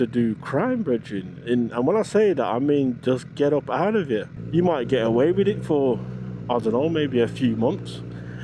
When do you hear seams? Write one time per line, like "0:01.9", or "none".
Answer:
0:04.4